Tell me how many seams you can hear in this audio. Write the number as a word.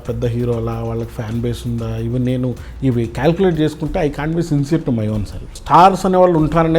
one